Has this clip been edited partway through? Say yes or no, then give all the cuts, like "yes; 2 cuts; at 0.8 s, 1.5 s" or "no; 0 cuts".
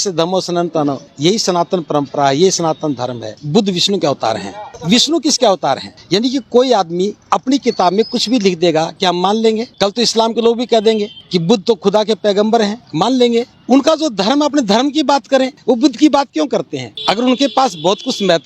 yes; 2 cuts; at 3.3 s, 5.9 s